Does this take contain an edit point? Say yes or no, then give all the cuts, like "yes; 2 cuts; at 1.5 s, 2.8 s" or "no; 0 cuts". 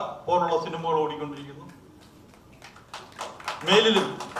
no; 0 cuts